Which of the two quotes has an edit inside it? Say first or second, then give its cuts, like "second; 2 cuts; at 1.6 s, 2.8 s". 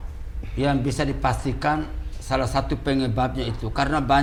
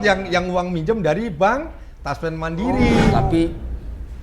second; 1 cut; at 3.2 s